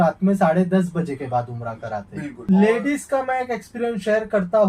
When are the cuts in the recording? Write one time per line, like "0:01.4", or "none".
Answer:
0:02.3